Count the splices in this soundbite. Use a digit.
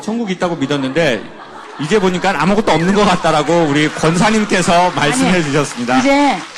0